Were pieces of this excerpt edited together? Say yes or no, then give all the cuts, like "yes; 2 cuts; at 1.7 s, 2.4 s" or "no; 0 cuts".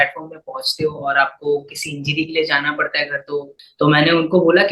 yes; 1 cut; at 3.6 s